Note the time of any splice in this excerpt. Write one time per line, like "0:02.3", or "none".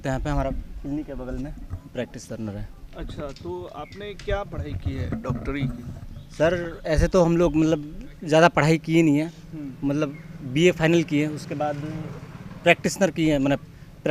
none